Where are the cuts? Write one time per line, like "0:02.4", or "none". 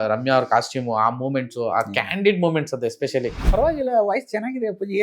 0:03.4